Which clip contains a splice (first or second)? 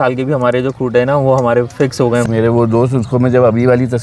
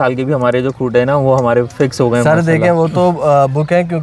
first